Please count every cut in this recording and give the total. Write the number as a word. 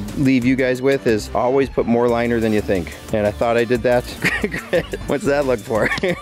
zero